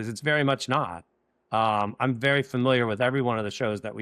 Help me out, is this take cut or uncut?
uncut